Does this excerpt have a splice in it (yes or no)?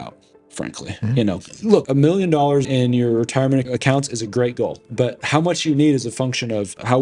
yes